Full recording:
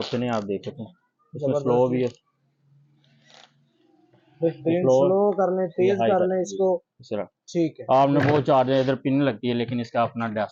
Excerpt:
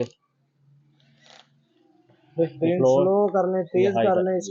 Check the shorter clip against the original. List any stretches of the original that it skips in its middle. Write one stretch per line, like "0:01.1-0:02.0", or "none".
none